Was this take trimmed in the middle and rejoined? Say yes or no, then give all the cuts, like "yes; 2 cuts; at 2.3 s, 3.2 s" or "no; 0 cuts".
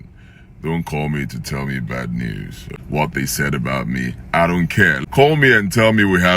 yes; 2 cuts; at 2.7 s, 5.0 s